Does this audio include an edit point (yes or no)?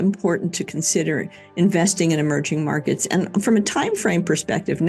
no